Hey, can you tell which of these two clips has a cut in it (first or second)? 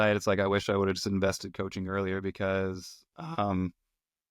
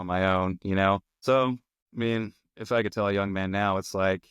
second